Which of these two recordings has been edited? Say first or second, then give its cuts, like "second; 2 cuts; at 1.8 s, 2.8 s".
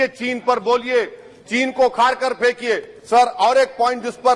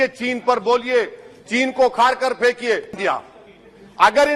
second; 1 cut; at 2.9 s